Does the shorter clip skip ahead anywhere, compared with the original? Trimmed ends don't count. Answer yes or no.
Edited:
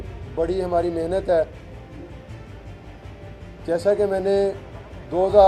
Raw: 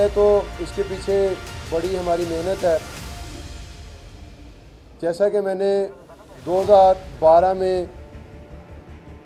no